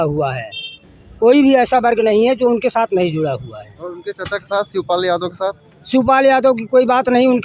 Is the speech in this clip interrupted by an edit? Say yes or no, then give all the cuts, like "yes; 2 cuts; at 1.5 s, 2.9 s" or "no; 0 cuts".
no; 0 cuts